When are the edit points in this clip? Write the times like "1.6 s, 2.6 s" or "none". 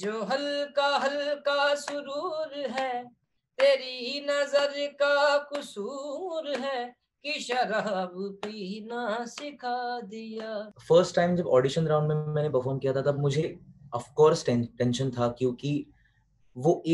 10.7 s